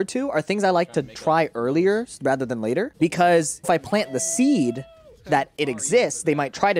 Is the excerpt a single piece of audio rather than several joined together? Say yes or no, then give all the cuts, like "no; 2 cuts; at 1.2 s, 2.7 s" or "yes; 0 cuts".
no; 2 cuts; at 2.9 s, 3.7 s